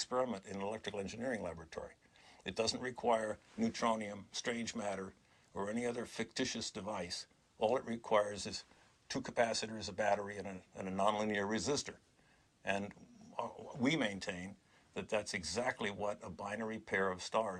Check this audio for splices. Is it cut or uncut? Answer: cut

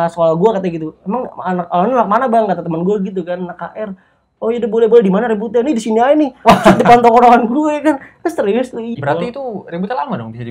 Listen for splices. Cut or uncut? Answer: cut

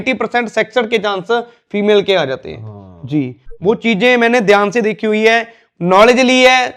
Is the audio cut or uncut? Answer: uncut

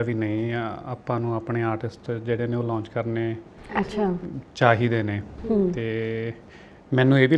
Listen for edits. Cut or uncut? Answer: uncut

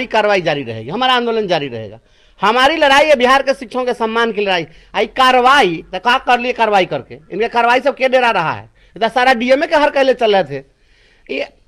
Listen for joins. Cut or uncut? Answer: uncut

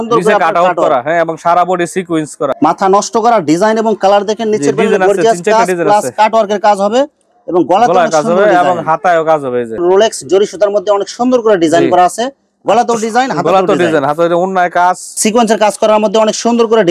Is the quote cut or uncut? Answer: cut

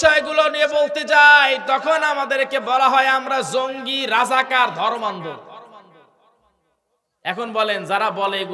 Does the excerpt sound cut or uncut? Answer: uncut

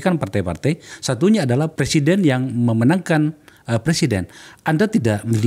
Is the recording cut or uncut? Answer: uncut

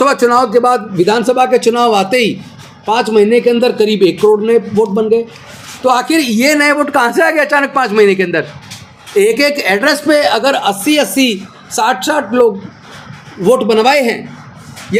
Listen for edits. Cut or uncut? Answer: uncut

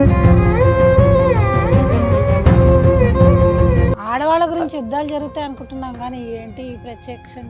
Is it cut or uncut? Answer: cut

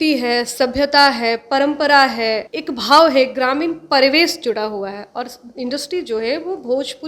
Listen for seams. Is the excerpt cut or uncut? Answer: cut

